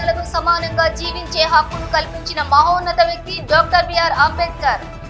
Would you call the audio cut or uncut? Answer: uncut